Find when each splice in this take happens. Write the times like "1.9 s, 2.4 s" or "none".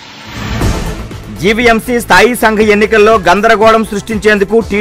1.1 s